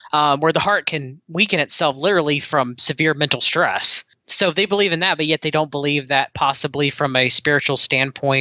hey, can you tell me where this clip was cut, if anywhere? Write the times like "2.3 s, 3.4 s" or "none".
4.2 s